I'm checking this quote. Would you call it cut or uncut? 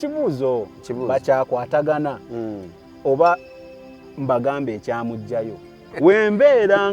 cut